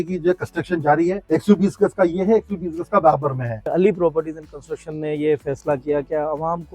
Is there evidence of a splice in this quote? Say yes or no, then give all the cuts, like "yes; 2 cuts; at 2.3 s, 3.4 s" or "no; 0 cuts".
yes; 2 cuts; at 1.2 s, 3.7 s